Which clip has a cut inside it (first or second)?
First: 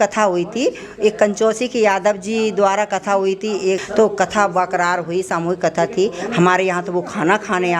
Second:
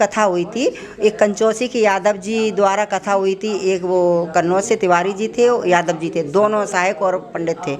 first